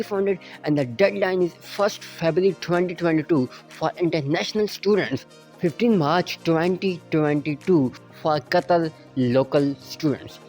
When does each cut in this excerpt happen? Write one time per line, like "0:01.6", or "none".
0:05.4
0:08.0